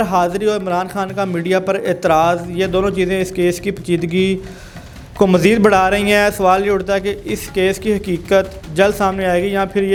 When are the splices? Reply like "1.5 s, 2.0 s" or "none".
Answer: none

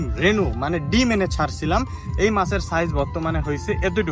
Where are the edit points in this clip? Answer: none

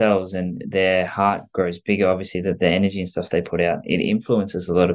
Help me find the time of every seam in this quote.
none

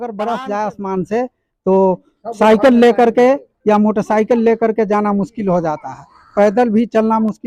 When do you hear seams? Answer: none

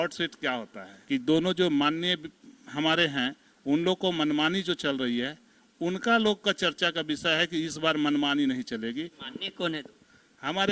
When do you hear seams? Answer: 0.9 s, 9.2 s

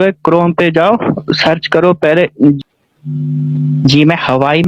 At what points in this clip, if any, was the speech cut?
2.6 s

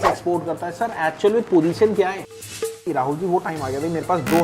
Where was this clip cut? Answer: 2.7 s

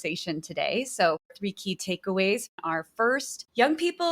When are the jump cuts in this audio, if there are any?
1.3 s, 2.5 s

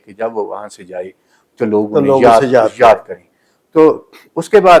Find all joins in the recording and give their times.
none

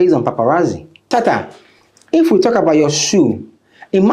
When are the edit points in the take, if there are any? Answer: 1.1 s

